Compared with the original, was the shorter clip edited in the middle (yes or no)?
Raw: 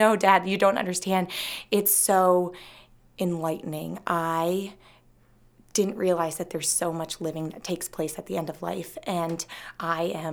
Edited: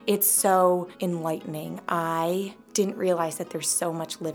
yes